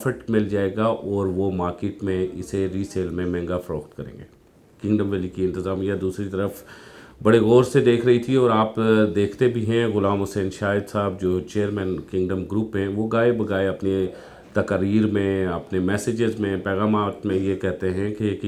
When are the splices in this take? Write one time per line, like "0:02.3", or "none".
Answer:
none